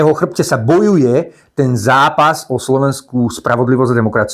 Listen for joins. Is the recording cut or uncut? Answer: uncut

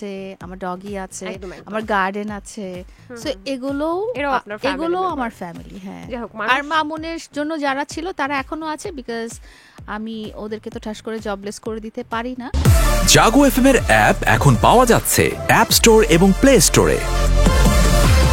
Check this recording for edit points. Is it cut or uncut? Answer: cut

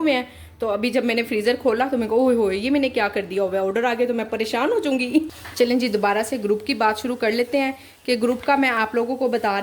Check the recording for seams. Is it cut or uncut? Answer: cut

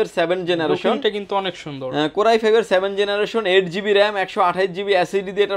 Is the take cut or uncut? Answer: uncut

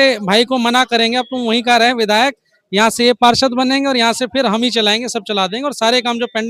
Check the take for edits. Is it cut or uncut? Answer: uncut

